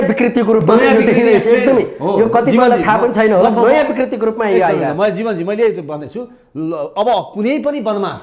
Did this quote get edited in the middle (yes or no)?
no